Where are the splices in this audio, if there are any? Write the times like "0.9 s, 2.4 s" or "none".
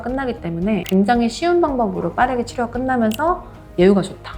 none